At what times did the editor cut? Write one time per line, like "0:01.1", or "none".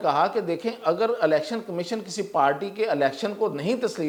none

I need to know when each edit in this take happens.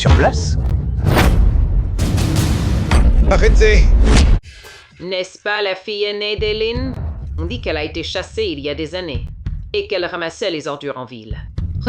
0:04.4

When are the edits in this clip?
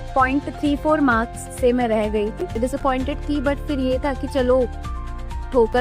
0:02.5

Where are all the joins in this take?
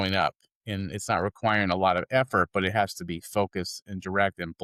none

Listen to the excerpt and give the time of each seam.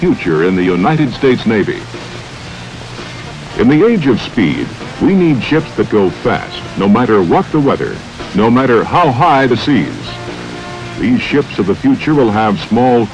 0:04.5

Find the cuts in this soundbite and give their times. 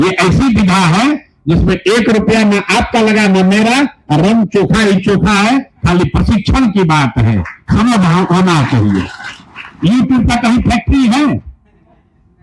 none

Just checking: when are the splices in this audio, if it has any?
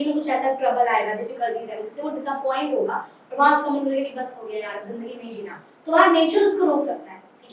none

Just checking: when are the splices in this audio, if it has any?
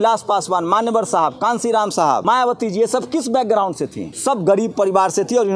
0:02.2
0:04.1

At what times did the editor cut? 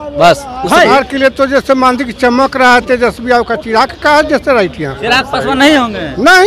0:00.9
0:05.0

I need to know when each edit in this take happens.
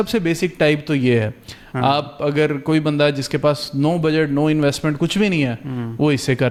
none

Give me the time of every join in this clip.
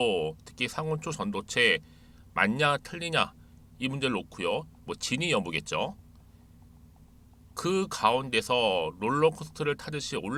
none

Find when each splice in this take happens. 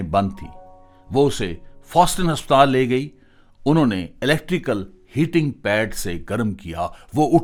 none

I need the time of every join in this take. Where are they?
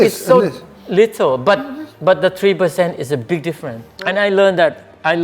0:04.1

